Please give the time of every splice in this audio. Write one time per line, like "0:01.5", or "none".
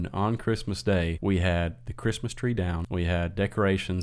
0:01.1
0:02.8